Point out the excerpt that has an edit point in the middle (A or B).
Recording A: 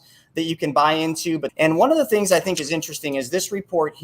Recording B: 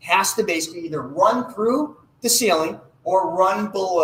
A